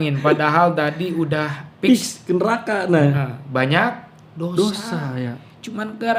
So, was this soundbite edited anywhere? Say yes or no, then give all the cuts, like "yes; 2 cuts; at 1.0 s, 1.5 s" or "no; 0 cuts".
no; 0 cuts